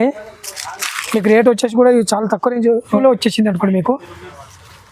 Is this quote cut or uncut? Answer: cut